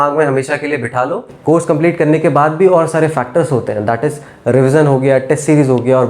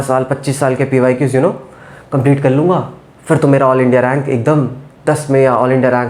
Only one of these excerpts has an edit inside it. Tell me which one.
first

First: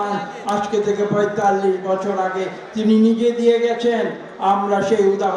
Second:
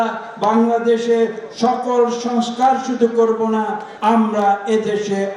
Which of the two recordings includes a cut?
second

